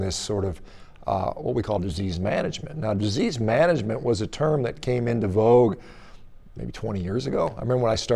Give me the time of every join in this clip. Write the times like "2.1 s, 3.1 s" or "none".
none